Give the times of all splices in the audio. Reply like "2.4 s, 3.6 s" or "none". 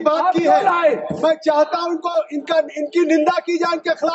none